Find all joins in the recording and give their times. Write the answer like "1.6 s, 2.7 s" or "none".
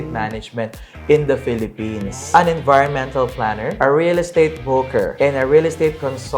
2.1 s, 3.7 s, 5.1 s